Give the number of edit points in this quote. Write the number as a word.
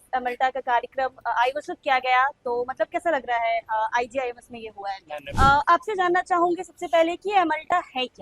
one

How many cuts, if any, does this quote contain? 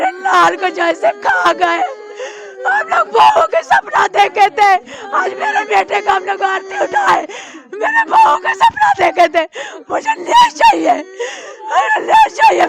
zero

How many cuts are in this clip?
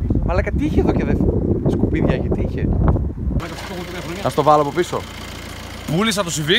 one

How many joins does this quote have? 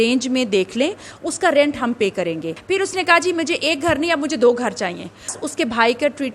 two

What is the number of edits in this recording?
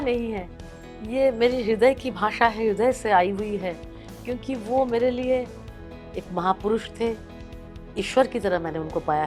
zero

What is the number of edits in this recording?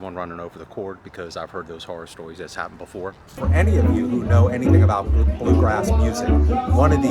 one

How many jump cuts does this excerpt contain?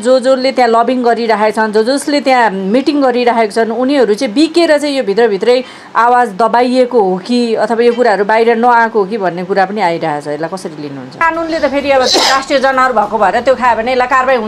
one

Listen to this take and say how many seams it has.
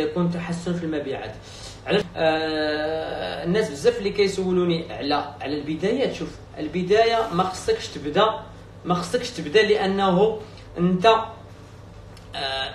one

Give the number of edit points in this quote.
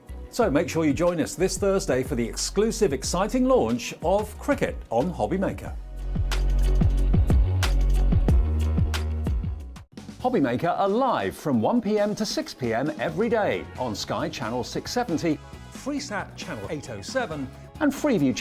one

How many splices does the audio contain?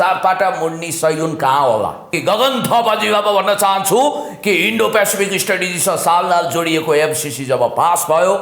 one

